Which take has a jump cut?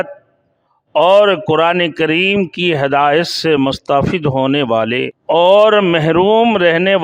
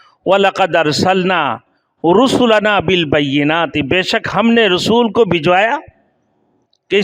first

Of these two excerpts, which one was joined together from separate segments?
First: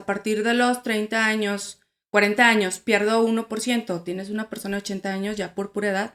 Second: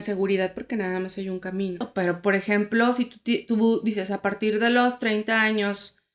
second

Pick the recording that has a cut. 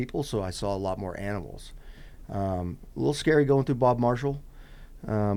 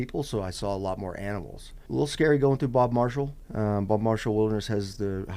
second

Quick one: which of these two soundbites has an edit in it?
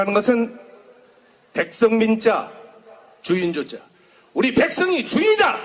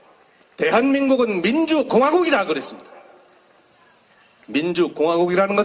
first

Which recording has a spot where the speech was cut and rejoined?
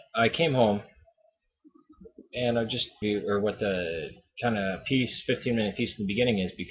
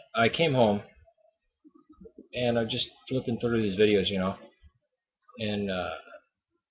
second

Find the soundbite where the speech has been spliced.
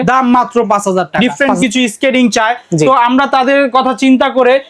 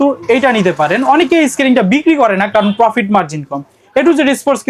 first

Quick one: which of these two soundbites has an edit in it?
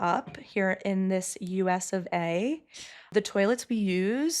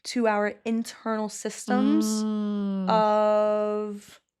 first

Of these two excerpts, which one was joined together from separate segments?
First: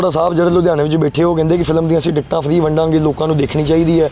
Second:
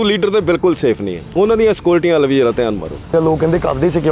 second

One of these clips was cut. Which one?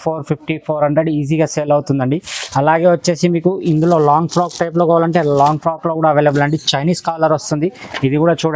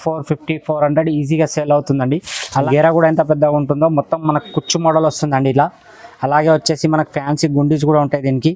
second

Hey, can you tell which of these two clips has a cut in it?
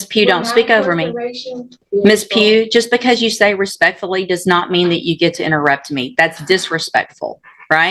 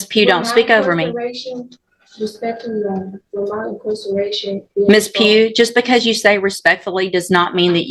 first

